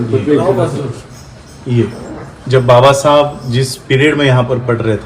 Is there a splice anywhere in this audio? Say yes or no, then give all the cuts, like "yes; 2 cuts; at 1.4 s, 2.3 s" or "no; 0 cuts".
no; 0 cuts